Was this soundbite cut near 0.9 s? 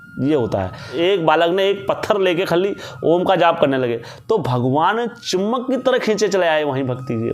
yes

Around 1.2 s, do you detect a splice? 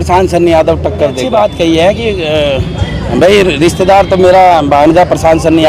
yes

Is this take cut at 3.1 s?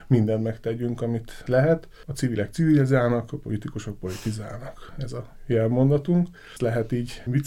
no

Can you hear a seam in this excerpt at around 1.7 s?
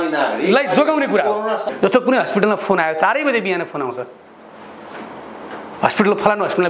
yes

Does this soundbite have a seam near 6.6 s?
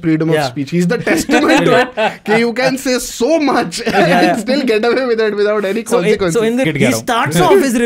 yes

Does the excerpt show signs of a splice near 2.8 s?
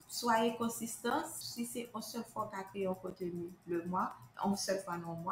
no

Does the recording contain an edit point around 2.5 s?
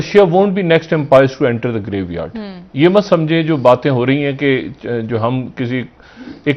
no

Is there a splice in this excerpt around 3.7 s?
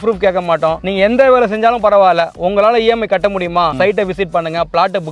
yes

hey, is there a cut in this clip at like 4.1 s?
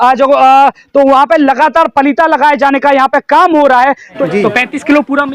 yes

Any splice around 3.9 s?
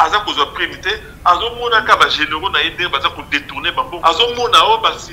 yes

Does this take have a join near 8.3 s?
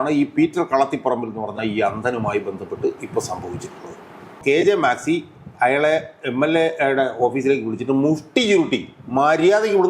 no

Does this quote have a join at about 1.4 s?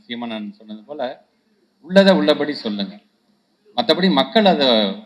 no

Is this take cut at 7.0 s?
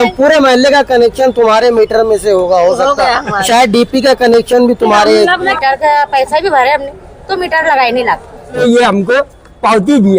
no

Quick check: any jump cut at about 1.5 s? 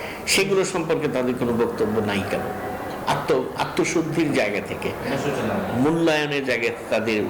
no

